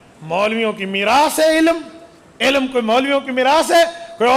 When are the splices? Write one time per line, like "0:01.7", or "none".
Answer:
none